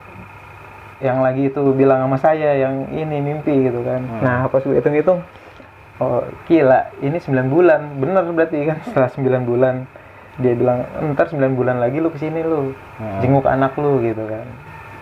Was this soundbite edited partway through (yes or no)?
no